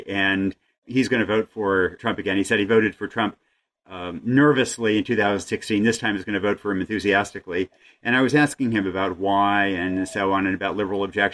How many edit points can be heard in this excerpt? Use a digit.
1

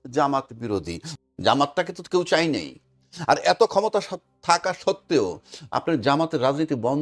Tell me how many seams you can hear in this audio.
1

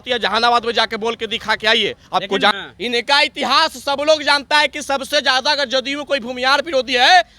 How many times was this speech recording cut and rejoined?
1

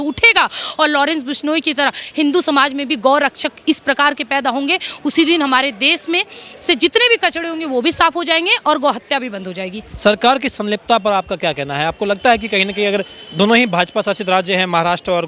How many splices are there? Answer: 0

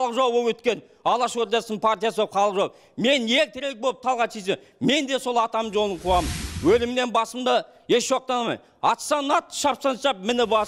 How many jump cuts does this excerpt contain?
0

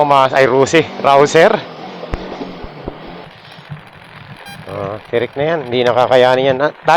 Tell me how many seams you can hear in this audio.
1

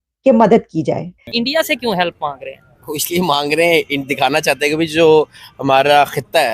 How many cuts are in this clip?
1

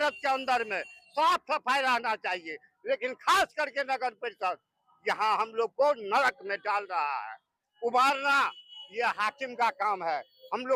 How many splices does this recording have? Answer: 0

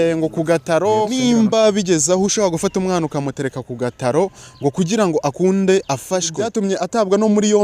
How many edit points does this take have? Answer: 2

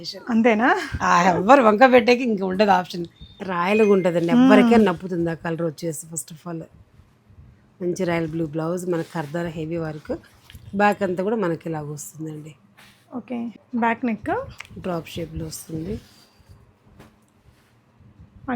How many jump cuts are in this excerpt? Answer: 2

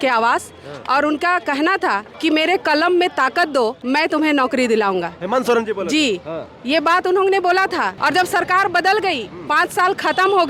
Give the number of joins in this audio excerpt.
3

